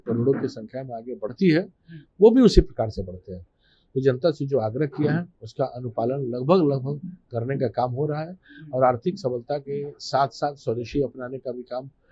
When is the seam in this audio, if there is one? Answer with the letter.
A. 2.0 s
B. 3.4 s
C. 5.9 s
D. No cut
D